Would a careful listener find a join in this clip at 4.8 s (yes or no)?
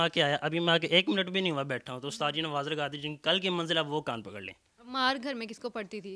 yes